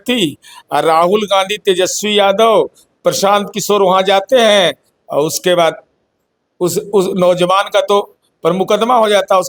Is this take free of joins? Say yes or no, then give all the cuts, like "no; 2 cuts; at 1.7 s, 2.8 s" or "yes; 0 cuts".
yes; 0 cuts